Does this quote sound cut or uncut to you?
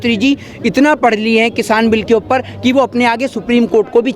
uncut